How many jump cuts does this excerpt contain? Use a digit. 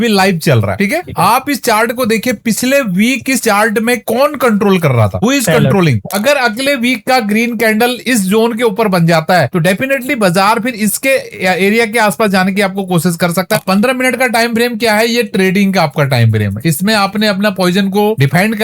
2